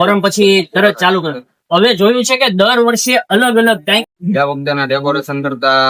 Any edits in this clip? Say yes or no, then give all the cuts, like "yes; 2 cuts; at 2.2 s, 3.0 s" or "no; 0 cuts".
yes; 1 cut; at 4.0 s